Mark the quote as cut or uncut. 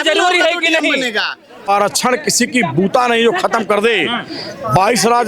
cut